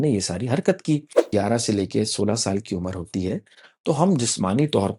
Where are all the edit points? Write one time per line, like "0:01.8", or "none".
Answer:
0:01.2